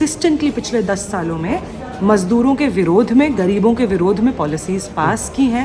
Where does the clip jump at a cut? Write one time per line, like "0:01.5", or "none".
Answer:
none